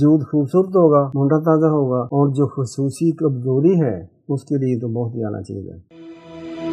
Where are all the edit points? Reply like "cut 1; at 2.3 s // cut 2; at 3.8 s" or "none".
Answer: cut 1; at 1.1 s // cut 2; at 2.1 s